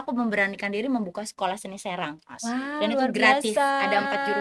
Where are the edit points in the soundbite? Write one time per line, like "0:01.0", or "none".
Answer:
none